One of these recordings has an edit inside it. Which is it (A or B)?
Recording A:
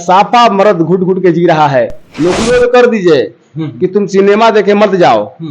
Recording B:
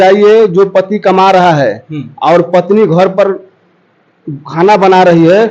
A